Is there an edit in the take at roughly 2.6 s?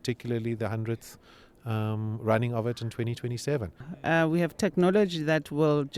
no; 1 cut; at 3.9 s

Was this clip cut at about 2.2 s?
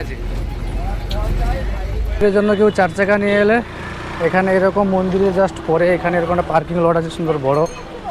yes; 1 cut; at 2.2 s

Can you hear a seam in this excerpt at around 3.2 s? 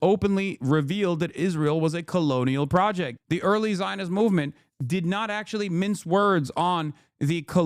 yes; 1 cut; at 3.2 s

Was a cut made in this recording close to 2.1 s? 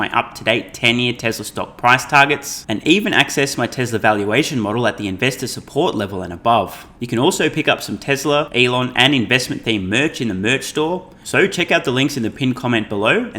no; 3 cuts; at 6.9 s, 8.5 s, 11.2 s

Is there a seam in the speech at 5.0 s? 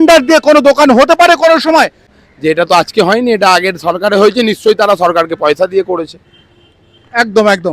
no; 1 cut; at 2.1 s

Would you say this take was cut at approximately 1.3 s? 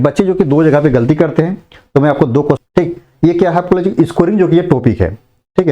no; 1 cut; at 2.6 s

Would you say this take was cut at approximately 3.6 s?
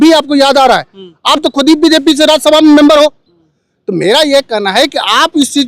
no; 0 cuts

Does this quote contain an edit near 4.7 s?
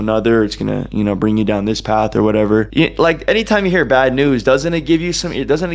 no; 1 cut; at 2.7 s

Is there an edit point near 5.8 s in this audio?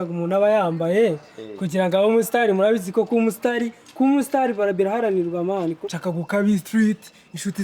yes; 1 cut; at 5.8 s

